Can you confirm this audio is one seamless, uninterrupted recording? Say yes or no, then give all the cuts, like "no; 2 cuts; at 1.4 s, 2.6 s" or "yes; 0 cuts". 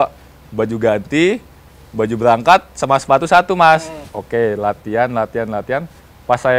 no; 1 cut; at 4.1 s